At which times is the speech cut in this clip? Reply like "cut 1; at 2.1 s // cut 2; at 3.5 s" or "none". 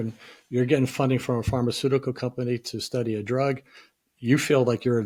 none